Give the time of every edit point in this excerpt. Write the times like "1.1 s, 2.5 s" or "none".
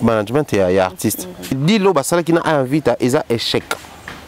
1.6 s